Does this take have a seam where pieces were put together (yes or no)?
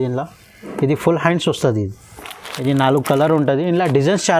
no